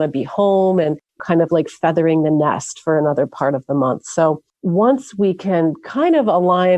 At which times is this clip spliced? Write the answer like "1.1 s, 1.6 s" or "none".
1.2 s, 4.5 s

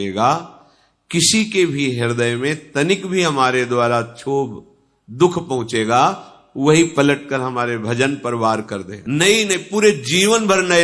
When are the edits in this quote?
8.9 s

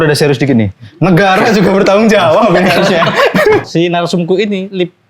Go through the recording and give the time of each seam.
3.7 s

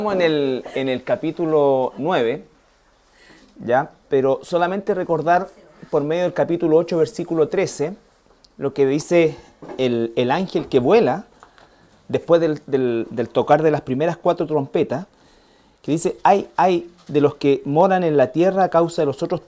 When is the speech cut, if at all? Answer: none

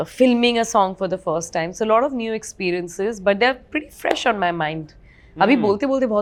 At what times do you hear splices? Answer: none

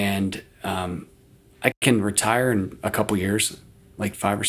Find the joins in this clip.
none

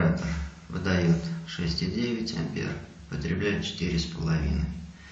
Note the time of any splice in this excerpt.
none

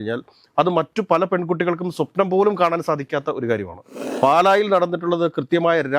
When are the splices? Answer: 4.0 s

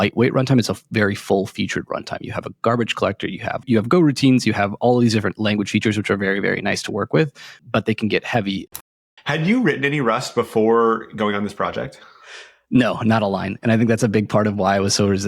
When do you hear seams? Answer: 3.6 s, 7.5 s, 8.8 s

